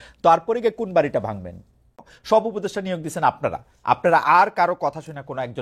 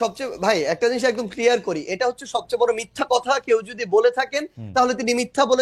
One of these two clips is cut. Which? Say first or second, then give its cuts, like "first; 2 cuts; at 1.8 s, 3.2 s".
first; 1 cut; at 2.1 s